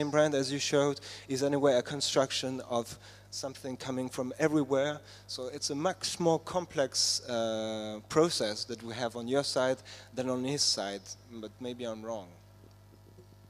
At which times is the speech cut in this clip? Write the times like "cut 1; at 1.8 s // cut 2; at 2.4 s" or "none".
none

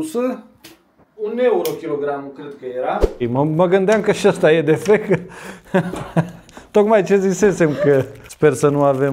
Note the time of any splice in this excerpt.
cut 1; at 3.2 s // cut 2; at 8.2 s

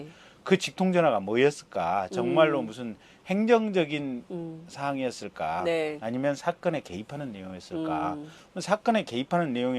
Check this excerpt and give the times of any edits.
cut 1; at 6.1 s

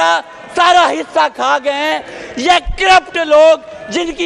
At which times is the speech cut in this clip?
none

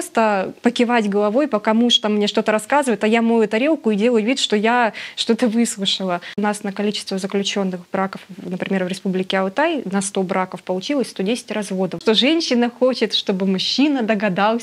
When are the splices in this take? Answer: cut 1; at 6.4 s // cut 2; at 12.0 s

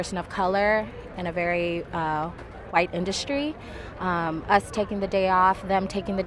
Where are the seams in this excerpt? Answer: none

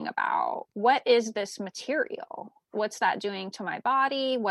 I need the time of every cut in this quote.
cut 1; at 2.6 s

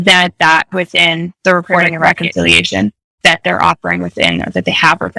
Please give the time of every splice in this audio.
cut 1; at 2.1 s // cut 2; at 3.2 s

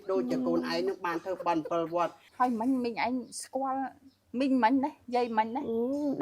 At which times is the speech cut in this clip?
cut 1; at 2.3 s

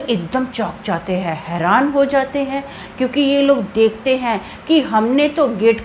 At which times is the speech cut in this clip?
none

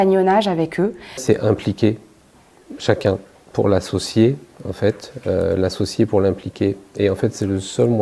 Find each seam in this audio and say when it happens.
cut 1; at 1.2 s

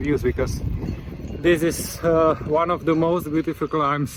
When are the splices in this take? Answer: none

